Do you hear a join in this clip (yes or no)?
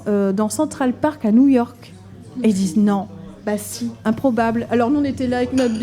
yes